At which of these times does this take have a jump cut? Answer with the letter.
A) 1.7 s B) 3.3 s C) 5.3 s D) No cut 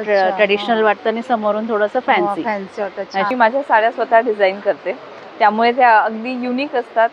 B